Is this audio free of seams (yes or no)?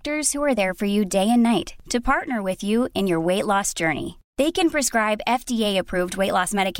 yes